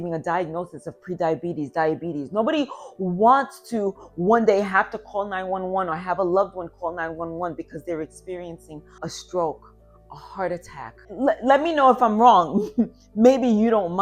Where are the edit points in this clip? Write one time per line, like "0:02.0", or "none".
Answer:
0:09.1
0:11.1